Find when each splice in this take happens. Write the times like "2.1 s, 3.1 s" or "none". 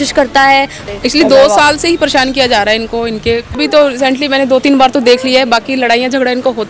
0.8 s, 3.5 s